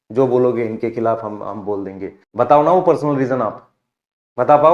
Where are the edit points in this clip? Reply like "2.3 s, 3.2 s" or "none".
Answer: 2.1 s